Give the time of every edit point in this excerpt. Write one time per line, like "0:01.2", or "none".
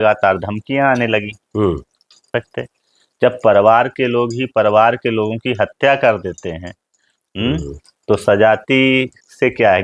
0:02.3